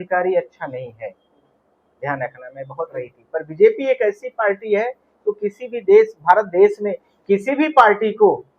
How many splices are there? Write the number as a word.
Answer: one